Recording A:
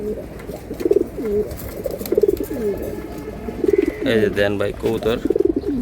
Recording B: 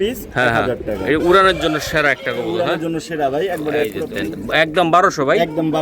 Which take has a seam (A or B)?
B